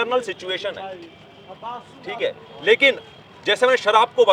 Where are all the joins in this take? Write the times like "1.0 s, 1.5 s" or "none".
none